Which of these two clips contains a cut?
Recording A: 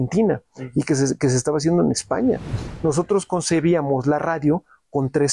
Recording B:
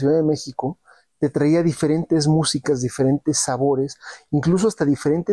A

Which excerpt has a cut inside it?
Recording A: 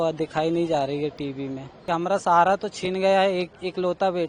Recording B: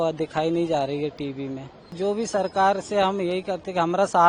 A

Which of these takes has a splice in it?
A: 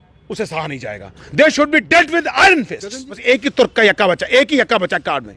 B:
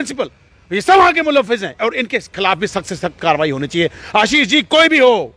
A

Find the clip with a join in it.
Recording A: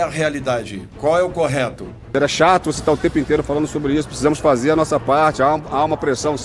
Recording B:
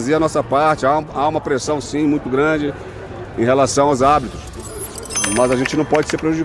A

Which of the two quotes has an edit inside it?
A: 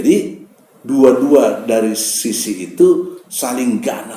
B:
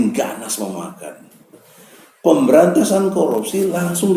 B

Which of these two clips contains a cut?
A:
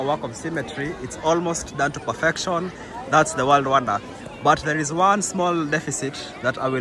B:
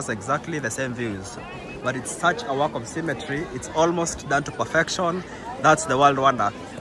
B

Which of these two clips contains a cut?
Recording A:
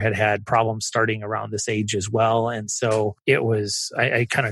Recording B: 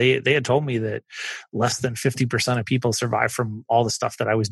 A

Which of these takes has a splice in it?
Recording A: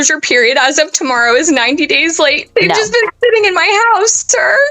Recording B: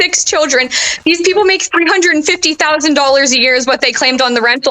A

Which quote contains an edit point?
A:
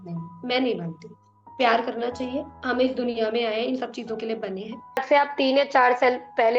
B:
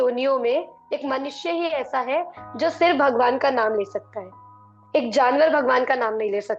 A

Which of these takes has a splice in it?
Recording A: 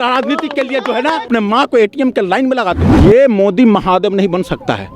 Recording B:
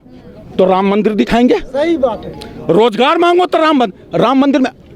A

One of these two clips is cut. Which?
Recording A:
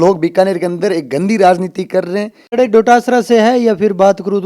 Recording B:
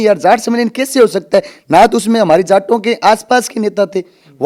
A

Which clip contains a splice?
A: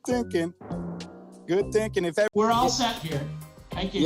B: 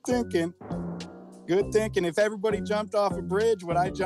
A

